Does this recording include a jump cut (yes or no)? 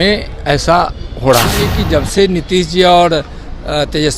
yes